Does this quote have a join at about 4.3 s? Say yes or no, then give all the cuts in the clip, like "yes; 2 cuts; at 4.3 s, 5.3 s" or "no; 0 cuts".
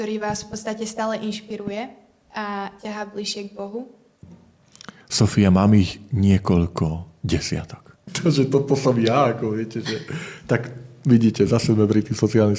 yes; 2 cuts; at 4.3 s, 8.2 s